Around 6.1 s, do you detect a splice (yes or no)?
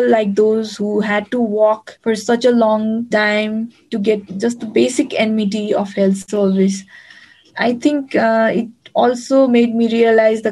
no